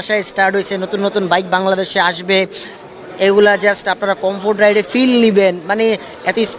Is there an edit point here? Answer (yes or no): no